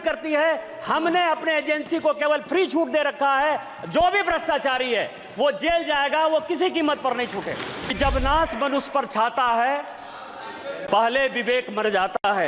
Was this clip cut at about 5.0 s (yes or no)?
no